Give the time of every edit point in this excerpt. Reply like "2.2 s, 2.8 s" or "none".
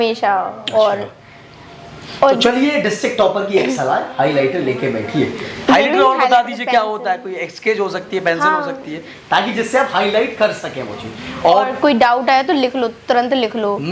none